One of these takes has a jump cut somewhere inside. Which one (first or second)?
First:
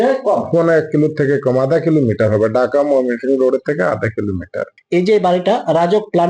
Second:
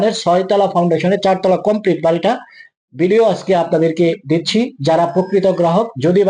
first